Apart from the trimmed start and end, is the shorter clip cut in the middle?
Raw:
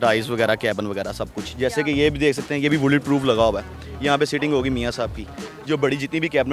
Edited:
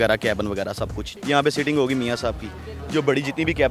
yes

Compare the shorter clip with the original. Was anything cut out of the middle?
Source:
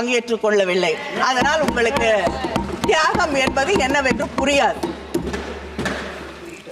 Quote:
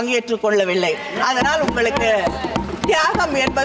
no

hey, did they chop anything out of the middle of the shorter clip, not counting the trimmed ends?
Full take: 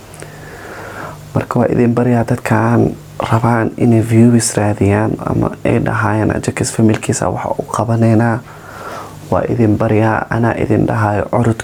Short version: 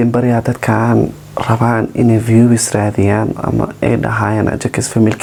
no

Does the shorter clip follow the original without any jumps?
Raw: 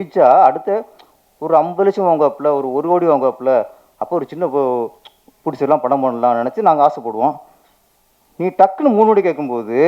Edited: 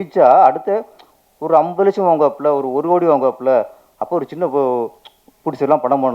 yes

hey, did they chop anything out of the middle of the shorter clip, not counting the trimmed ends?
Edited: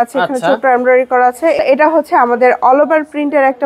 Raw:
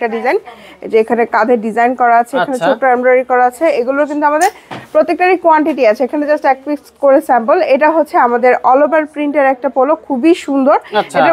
yes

